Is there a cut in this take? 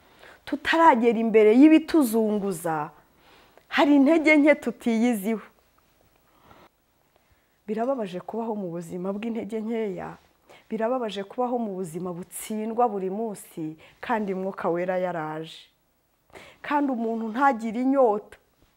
yes; 1 cut; at 6.7 s

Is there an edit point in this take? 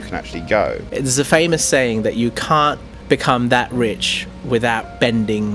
yes; 2 cuts; at 0.8 s, 2.9 s

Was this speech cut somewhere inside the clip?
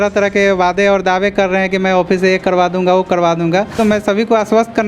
yes; 1 cut; at 3.8 s

